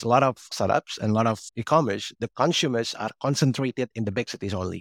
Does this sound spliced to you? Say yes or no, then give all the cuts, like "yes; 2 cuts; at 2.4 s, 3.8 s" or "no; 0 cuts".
no; 0 cuts